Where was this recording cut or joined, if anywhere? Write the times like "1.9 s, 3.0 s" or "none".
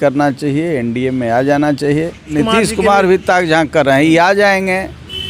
2.3 s